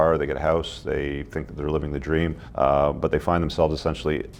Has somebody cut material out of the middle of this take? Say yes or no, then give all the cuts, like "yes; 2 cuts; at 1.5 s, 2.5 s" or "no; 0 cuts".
yes; 1 cut; at 2.4 s